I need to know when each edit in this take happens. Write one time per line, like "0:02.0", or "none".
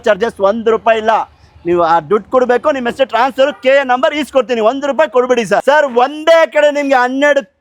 0:05.6